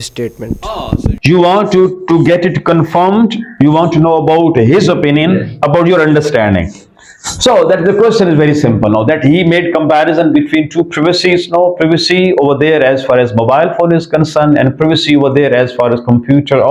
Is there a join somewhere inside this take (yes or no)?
no